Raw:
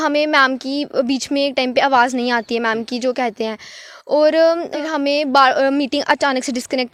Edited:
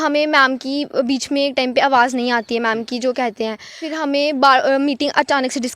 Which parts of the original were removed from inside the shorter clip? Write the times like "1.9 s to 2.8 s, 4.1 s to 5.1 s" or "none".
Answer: 3.8 s to 4.8 s